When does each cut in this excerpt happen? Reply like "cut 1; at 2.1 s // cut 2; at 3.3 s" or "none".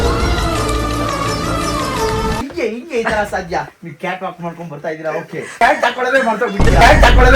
cut 1; at 2.4 s // cut 2; at 3.7 s // cut 3; at 5.5 s